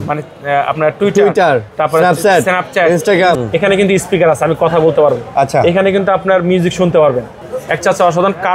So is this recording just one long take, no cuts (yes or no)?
no